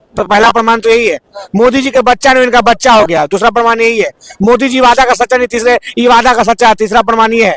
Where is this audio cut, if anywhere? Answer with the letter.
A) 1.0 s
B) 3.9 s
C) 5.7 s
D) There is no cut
D